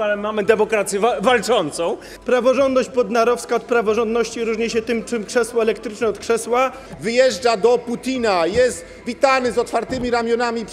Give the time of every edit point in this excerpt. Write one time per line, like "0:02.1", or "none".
0:02.1
0:06.9